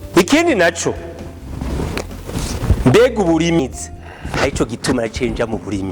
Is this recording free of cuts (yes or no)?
no